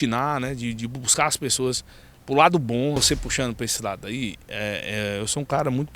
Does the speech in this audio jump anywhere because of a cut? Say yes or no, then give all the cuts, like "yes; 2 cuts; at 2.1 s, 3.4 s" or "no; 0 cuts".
yes; 1 cut; at 3.0 s